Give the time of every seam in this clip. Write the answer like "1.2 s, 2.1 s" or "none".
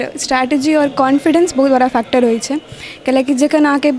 none